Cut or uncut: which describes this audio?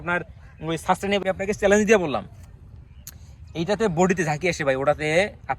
cut